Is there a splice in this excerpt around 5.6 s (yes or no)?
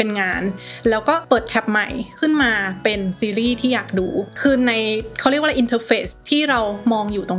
no